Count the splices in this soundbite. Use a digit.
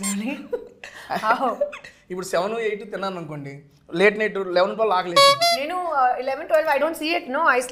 0